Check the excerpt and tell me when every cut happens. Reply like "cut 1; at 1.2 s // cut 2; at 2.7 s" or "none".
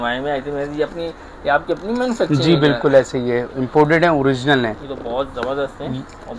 none